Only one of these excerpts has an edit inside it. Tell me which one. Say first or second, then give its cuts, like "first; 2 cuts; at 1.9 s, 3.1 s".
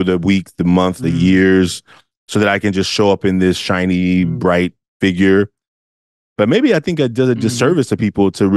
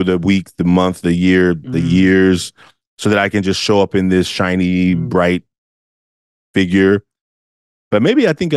first; 2 cuts; at 1.0 s, 4.8 s